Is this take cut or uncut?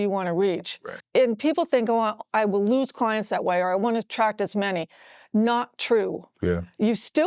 cut